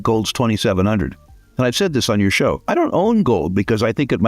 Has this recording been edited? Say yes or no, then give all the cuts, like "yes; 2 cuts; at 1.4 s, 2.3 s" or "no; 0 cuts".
yes; 1 cut; at 2.6 s